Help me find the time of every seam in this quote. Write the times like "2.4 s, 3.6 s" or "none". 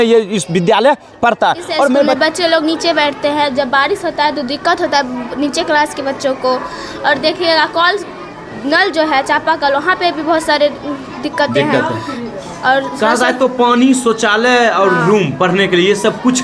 2.1 s

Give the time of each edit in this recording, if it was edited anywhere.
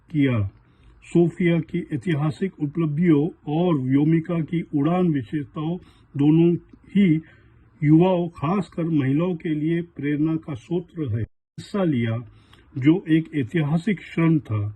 11.7 s

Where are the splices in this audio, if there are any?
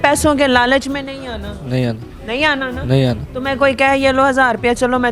none

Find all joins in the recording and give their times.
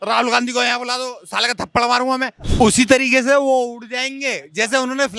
2.3 s

